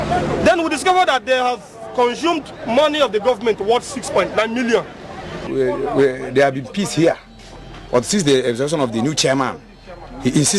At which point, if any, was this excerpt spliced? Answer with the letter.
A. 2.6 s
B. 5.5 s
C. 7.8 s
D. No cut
B